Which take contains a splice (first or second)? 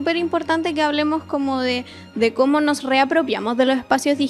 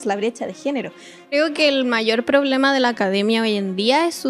second